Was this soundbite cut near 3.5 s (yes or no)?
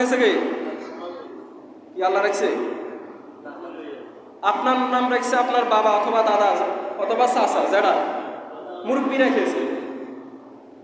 no